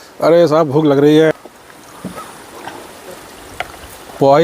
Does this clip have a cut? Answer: yes; 1 cut; at 1.3 s

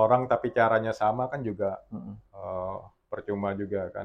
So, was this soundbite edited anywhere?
no; 0 cuts

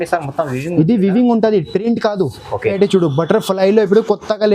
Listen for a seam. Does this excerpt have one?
yes; 1 cut; at 2.7 s

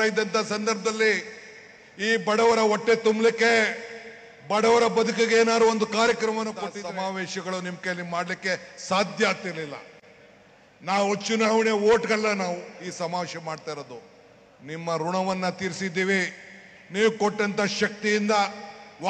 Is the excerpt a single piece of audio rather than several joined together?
no; 1 cut; at 6.7 s

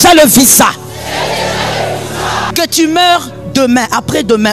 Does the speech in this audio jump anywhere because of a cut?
yes; 1 cut; at 2.5 s

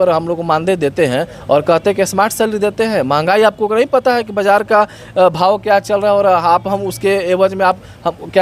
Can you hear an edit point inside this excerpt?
no; 0 cuts

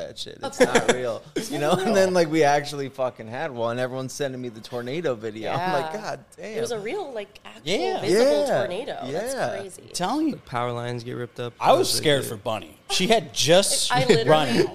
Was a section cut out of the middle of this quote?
yes; 1 cut; at 10.4 s

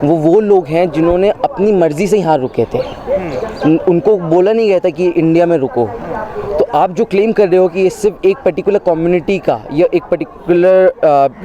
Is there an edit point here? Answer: no; 0 cuts

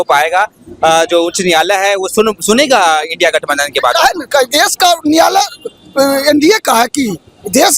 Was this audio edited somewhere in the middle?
no; 0 cuts

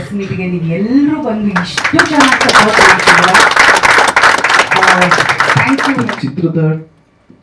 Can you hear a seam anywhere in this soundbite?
yes; 1 cut; at 6.0 s

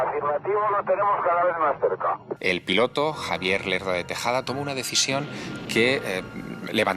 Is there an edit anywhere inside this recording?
yes; 1 cut; at 2.3 s

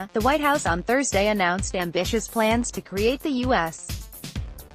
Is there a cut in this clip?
yes; 1 cut; at 3.8 s

